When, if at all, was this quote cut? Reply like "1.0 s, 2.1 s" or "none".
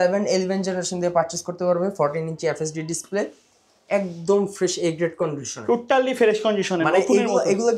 none